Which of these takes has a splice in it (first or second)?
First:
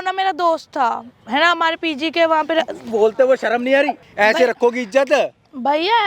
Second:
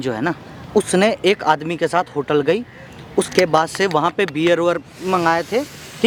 first